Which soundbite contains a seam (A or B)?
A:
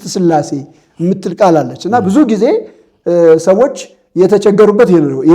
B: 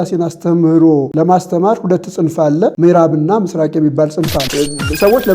B